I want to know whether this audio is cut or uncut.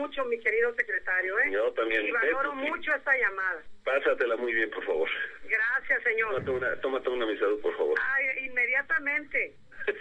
uncut